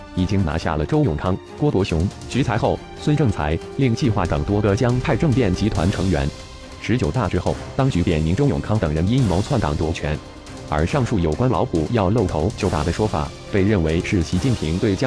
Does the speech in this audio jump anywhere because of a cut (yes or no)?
yes